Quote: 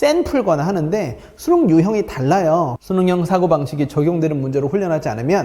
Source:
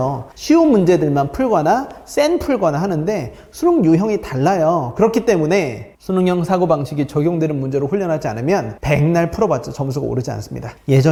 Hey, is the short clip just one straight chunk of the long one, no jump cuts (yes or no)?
no